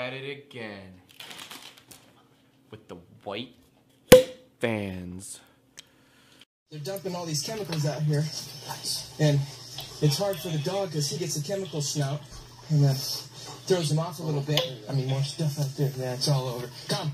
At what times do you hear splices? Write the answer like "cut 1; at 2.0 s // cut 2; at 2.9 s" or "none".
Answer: none